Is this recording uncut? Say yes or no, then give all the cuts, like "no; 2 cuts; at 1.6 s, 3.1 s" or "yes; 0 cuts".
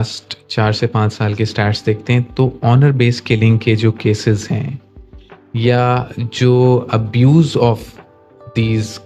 yes; 0 cuts